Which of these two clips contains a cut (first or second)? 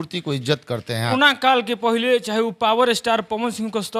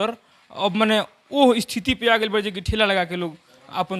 first